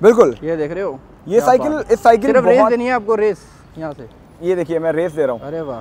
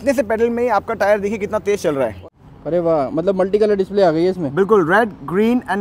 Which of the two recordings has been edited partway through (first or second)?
second